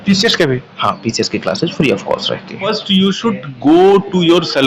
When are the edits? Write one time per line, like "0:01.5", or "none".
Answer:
0:02.8